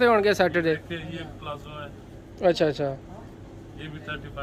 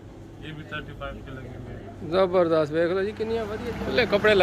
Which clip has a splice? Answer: second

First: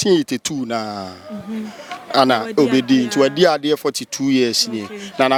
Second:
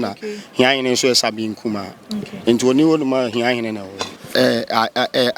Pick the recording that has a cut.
second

